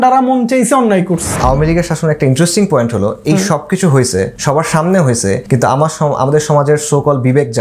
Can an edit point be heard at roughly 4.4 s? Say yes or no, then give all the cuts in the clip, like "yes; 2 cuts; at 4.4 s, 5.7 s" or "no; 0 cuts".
yes; 3 cuts; at 1.4 s, 4.4 s, 5.4 s